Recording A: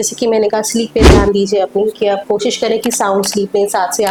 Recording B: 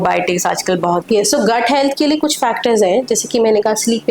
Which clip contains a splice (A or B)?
B